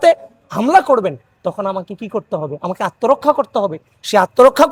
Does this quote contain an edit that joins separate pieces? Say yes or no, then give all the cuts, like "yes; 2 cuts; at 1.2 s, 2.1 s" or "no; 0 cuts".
no; 0 cuts